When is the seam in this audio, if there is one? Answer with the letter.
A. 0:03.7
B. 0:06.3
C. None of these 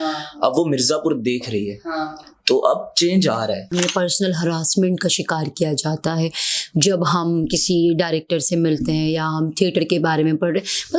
A